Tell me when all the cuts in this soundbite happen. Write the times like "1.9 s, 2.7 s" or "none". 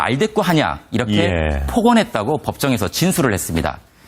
none